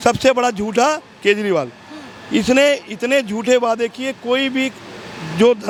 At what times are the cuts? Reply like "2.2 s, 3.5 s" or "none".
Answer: none